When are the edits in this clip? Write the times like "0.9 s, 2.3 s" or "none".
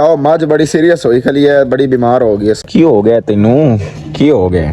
2.6 s